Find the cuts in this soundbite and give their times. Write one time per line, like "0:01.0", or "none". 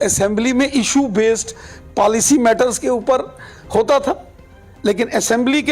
none